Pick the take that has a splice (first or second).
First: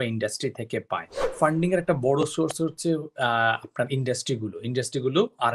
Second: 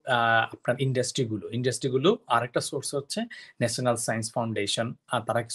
first